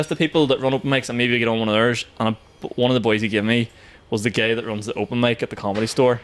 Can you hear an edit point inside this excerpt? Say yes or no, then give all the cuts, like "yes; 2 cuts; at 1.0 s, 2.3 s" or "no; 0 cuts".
no; 0 cuts